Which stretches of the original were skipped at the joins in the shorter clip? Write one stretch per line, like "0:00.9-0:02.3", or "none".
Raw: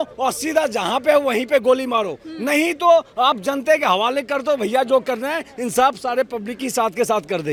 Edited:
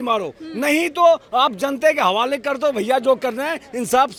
none

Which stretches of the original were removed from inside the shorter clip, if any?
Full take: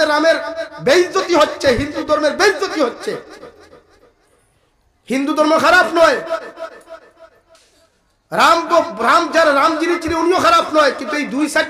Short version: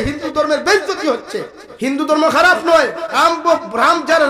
0:03.3-0:04.9
0:06.4-0:08.4

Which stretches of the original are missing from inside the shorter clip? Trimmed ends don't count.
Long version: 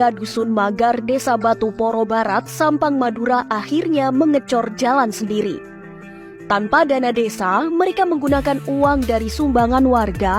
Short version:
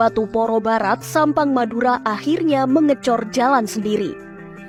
none

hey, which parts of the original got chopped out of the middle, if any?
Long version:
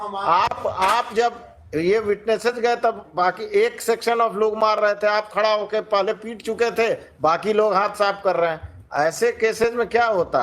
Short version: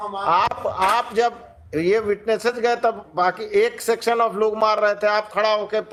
none

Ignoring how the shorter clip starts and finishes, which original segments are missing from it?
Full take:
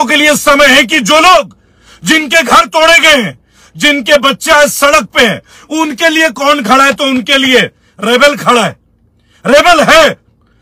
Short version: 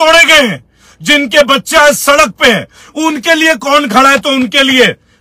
none

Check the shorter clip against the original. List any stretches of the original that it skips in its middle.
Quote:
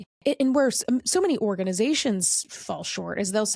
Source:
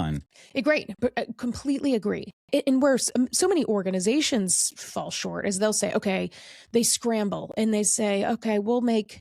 none

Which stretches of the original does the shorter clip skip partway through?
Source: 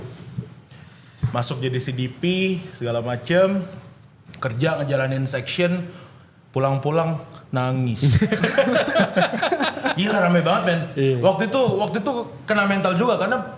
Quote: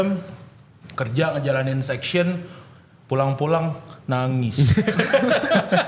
none

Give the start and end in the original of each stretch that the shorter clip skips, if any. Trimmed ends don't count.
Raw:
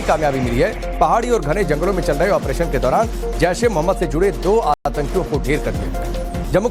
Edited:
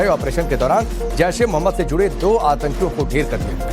0:04.7-0:04.9

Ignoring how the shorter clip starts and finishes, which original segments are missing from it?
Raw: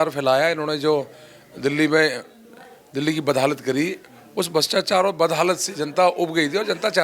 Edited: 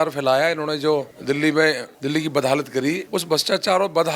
0:01.1-0:01.5
0:02.3-0:02.8
0:04.0-0:04.3

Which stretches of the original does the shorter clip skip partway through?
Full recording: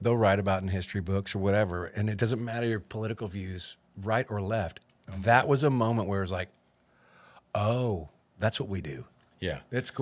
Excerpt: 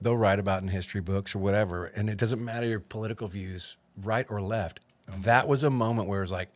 none

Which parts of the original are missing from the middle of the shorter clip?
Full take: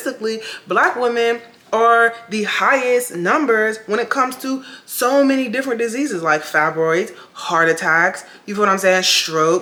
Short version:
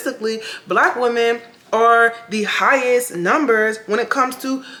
none

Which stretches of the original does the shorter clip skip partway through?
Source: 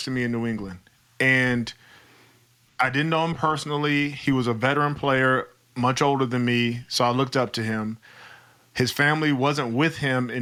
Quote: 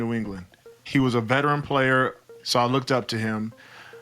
0:01.1-0:04.1
0:05.7-0:06.8

